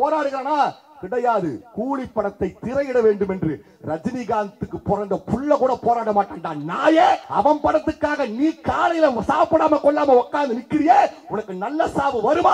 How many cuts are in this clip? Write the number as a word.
one